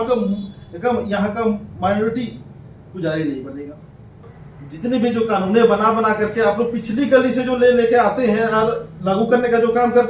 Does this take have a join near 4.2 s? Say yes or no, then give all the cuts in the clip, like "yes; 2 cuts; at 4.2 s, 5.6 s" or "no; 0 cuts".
yes; 1 cut; at 4.2 s